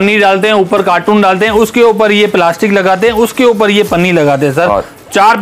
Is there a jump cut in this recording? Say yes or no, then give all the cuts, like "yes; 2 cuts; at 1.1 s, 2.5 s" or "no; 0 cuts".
no; 0 cuts